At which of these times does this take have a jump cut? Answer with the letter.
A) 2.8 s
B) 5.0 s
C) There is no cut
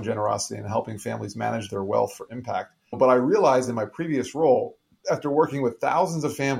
A